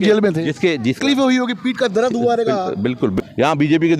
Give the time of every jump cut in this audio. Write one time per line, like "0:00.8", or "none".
0:01.0
0:03.1

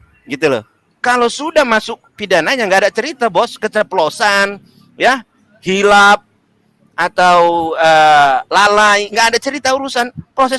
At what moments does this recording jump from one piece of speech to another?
none

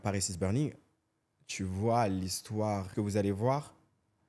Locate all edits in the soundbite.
0:02.9

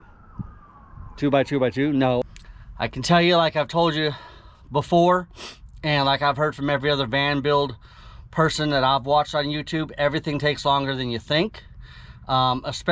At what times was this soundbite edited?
0:02.2

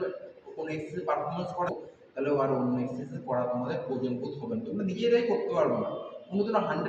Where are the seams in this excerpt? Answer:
0:01.7

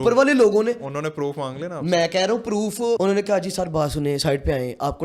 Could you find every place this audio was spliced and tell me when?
0:03.0

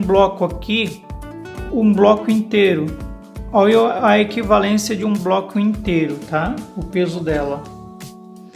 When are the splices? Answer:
none

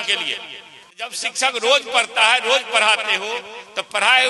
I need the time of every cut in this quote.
0:01.2

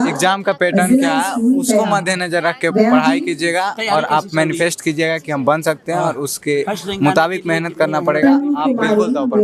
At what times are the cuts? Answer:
none

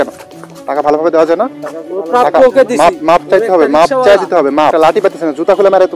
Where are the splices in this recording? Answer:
0:04.7

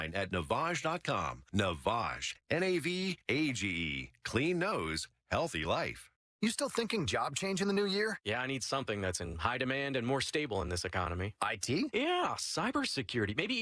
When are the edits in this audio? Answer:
0:06.2

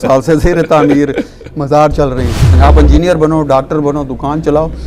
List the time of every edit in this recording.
0:02.5

